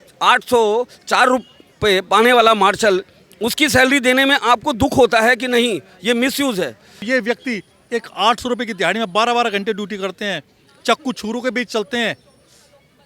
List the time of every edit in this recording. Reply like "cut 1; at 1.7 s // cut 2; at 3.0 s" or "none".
cut 1; at 7.0 s